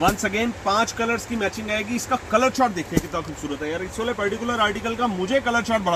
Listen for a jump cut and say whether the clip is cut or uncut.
uncut